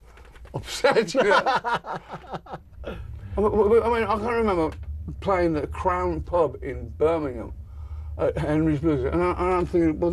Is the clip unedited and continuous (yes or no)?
no